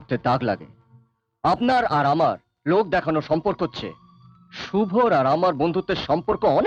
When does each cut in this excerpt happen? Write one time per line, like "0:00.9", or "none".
none